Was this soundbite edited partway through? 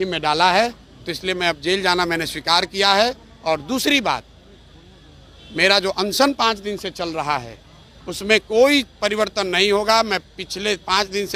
no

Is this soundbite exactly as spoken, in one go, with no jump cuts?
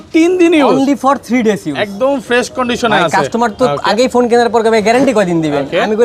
yes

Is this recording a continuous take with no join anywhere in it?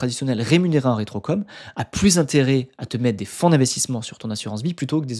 yes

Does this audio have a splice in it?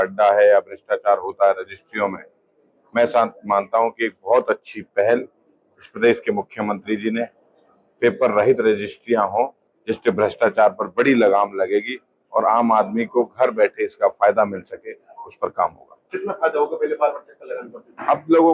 no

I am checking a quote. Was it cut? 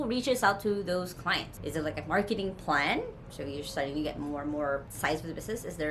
yes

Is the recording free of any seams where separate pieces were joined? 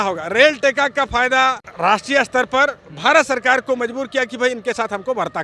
yes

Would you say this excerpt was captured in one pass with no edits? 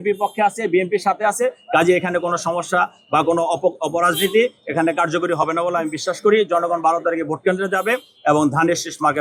yes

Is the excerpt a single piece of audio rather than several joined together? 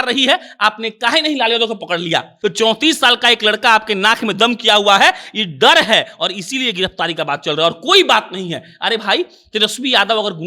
no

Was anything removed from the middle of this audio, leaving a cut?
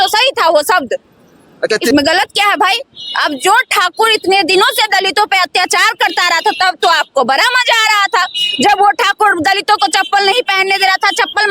yes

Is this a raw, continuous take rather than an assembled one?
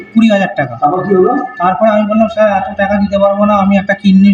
yes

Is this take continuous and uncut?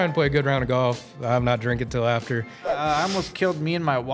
no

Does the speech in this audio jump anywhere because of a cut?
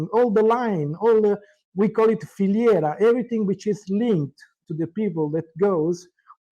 no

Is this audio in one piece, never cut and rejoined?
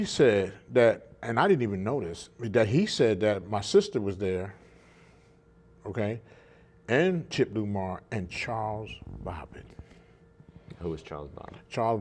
no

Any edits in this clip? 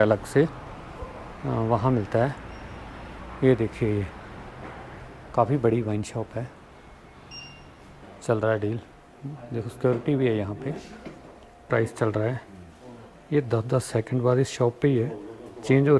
yes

